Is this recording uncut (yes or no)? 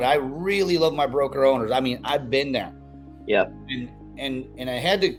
yes